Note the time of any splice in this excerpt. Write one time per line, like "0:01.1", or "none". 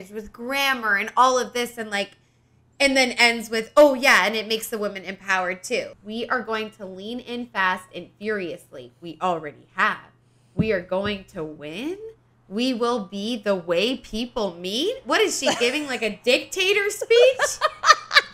0:05.9